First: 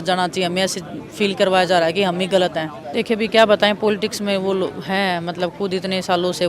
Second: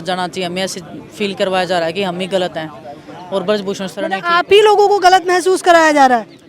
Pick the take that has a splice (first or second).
first